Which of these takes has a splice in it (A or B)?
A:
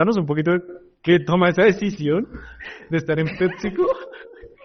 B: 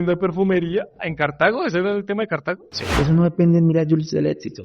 B